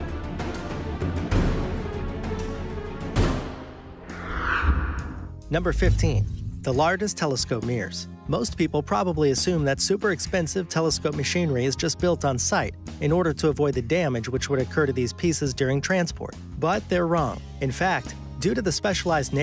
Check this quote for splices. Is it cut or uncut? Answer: cut